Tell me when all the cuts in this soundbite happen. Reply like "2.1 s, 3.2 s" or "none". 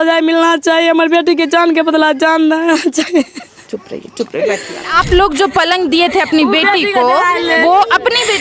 5.0 s